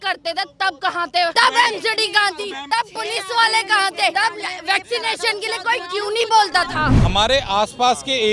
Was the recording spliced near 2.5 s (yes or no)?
yes